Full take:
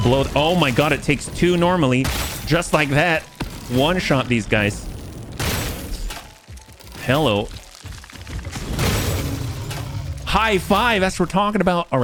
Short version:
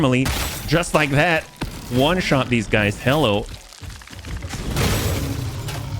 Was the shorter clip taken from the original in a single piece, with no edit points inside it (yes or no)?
no